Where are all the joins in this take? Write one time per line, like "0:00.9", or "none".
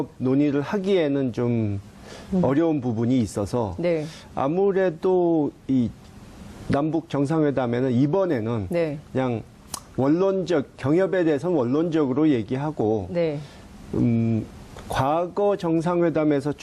0:12.7